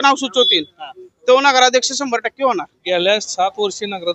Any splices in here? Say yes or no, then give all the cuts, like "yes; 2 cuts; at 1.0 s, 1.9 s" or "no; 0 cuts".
yes; 1 cut; at 2.7 s